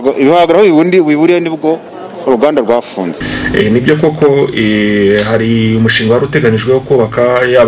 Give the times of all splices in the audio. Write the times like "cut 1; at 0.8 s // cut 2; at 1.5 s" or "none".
cut 1; at 3.3 s